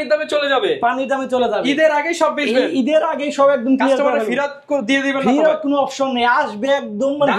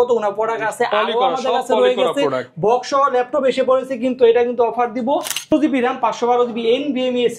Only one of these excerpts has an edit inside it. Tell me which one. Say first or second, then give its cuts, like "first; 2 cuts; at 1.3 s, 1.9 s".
second; 1 cut; at 5.5 s